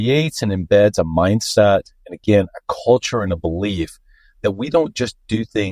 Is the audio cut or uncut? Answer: uncut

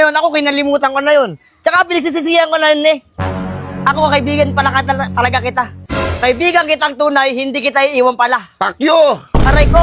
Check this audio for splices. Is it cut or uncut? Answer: uncut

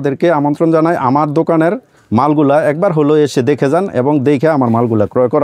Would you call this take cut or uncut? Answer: uncut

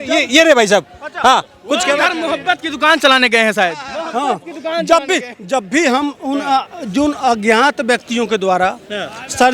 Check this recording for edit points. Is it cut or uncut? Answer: uncut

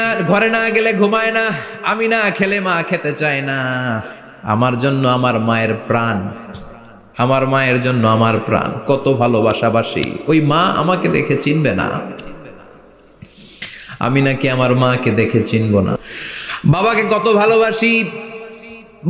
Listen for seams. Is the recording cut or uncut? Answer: cut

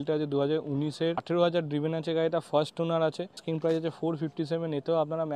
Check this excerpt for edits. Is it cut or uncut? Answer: cut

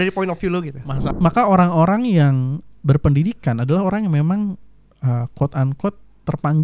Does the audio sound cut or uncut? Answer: cut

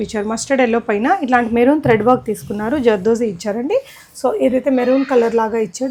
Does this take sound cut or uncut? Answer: uncut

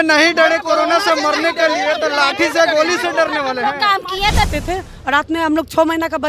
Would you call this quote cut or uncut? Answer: cut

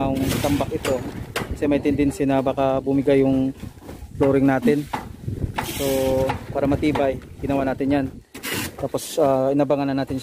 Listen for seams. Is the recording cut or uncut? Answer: uncut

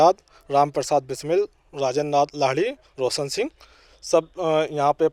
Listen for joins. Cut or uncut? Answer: uncut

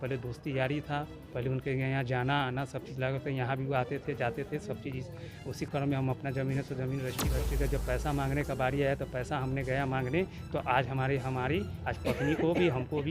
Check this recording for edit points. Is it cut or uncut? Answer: cut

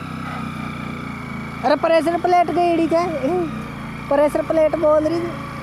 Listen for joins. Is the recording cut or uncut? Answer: uncut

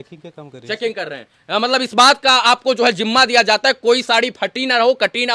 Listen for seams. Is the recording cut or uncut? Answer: uncut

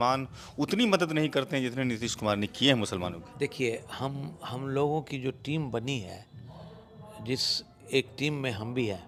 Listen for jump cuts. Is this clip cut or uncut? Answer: uncut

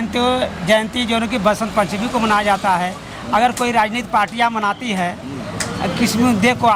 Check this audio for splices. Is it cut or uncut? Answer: uncut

